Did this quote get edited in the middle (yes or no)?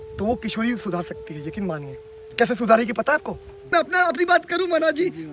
yes